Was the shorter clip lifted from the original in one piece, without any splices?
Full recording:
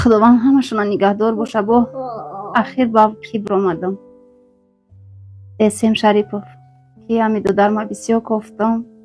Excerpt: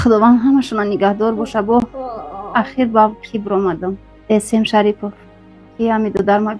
no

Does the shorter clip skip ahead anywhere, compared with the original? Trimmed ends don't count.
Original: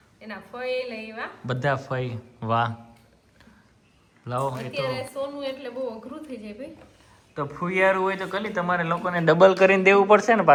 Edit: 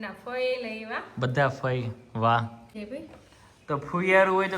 yes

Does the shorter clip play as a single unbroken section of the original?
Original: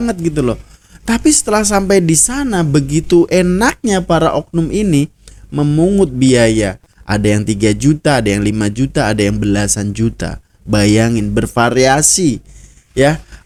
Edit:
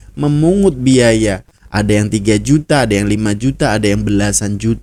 yes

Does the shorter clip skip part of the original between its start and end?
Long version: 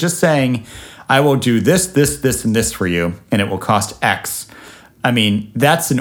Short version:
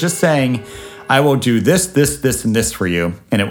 no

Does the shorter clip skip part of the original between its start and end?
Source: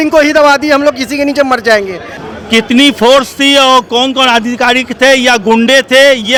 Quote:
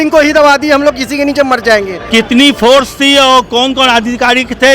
yes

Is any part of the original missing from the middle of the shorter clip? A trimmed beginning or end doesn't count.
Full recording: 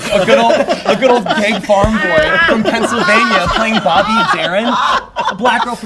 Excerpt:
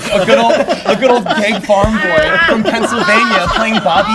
no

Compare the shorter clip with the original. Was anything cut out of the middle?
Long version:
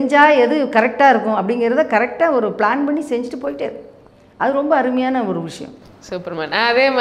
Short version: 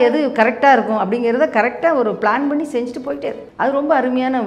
yes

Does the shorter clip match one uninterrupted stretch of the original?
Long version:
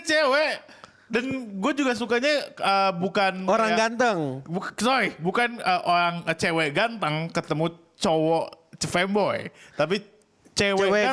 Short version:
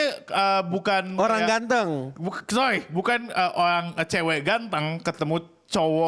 yes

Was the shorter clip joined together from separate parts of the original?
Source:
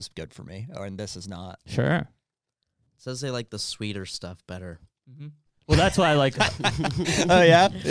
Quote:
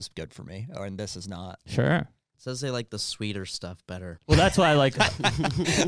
yes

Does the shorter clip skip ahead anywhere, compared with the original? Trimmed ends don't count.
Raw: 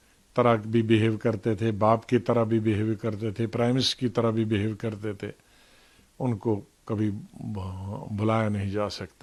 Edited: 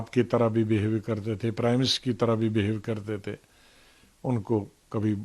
no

